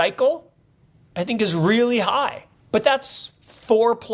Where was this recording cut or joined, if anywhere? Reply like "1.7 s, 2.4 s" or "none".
2.5 s